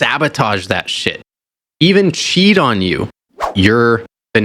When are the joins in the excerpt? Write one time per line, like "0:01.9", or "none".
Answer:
0:03.5